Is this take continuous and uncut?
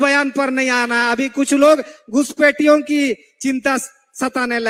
yes; 0 cuts

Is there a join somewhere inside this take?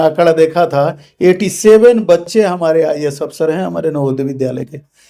no; 0 cuts

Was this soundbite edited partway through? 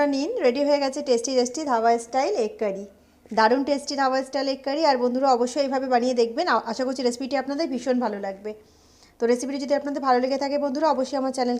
no; 0 cuts

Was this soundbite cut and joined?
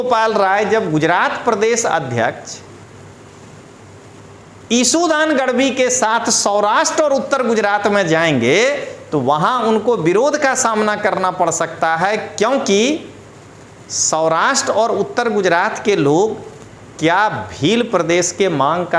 no; 0 cuts

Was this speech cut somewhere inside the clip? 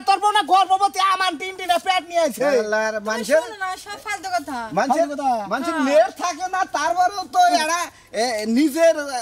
no; 0 cuts

